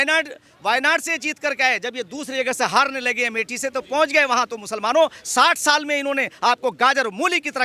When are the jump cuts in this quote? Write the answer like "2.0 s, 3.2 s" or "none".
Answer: none